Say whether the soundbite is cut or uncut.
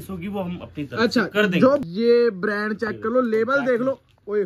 cut